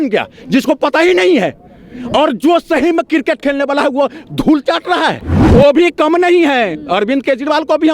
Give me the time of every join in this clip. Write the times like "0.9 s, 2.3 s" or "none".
5.4 s